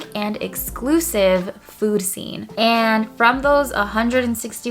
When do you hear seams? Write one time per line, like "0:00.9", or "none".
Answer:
0:02.5